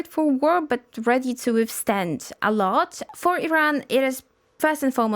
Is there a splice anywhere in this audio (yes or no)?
yes